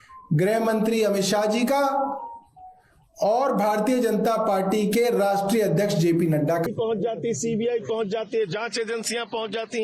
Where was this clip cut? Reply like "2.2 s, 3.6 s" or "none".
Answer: 6.6 s